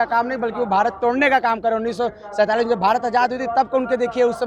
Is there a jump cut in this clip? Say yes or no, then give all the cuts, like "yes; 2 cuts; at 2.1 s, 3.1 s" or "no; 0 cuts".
no; 0 cuts